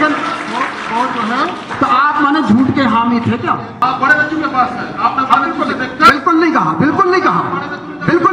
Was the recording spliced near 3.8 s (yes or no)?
yes